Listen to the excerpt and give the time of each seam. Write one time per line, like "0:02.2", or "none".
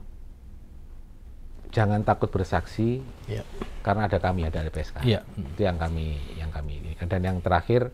none